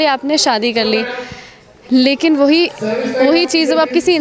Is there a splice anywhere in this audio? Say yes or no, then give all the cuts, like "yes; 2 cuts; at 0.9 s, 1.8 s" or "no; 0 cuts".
no; 0 cuts